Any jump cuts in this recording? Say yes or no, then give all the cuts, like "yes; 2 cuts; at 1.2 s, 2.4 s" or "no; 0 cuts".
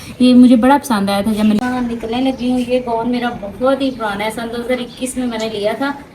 yes; 1 cut; at 1.6 s